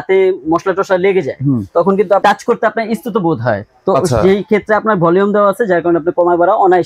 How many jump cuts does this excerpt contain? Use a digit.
1